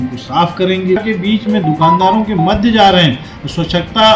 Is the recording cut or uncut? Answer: cut